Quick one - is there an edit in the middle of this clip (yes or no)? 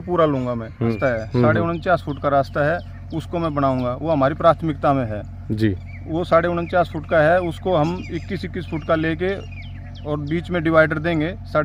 yes